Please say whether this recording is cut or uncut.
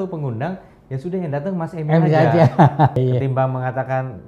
cut